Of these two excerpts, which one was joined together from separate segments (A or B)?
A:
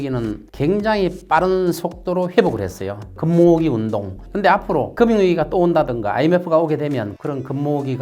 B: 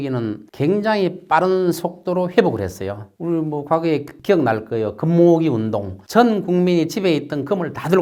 A